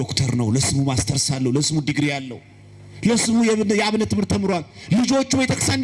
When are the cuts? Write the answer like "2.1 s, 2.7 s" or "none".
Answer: none